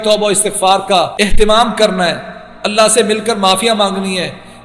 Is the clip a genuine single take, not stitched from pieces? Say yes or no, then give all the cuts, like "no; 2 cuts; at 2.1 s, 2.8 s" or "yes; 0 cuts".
no; 1 cut; at 1.1 s